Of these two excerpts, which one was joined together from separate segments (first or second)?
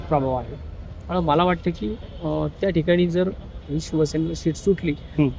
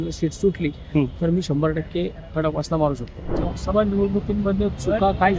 second